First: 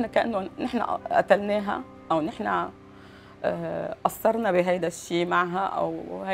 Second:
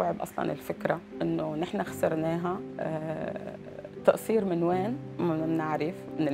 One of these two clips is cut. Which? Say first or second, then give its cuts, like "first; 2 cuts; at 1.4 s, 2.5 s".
second; 3 cuts; at 1.1 s, 2.7 s, 5.1 s